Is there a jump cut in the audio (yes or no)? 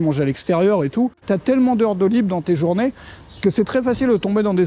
yes